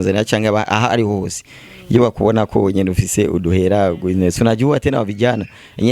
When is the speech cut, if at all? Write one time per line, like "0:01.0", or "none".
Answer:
none